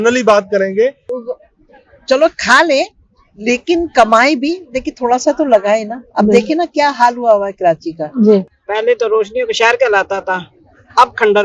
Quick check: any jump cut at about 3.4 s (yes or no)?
no